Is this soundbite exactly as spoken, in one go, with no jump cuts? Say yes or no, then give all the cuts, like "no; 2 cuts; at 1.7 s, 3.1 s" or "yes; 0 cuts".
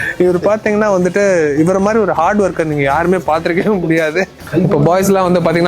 no; 1 cut; at 4.3 s